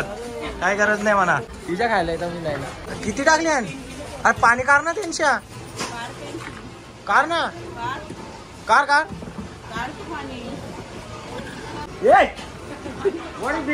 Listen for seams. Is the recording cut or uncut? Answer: cut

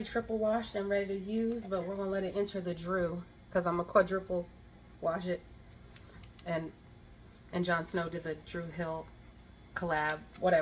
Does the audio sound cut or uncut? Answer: uncut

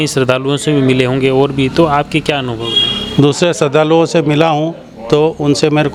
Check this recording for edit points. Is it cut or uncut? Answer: uncut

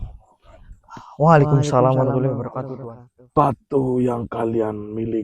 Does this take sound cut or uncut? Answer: cut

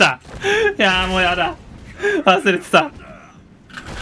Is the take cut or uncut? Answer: uncut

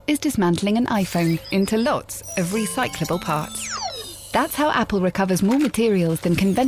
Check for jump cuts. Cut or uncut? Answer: uncut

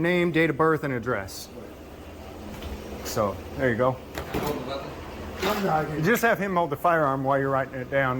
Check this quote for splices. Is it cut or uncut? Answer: uncut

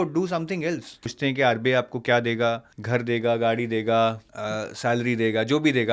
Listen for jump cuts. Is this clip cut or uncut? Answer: cut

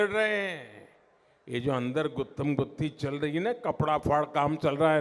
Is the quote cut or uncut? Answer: uncut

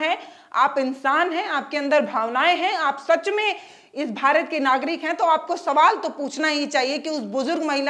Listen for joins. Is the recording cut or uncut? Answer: uncut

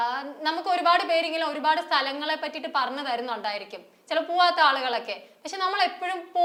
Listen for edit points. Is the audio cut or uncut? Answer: uncut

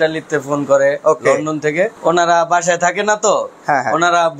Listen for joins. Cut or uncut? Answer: cut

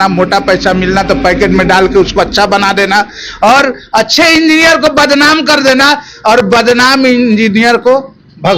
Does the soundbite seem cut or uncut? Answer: uncut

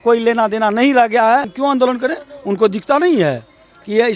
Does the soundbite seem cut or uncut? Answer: cut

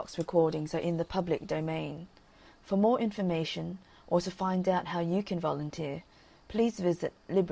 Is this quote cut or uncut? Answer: uncut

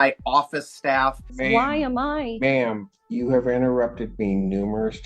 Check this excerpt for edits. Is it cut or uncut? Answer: cut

